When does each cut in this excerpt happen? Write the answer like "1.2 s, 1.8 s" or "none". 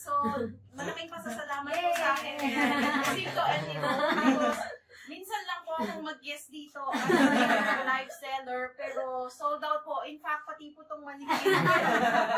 none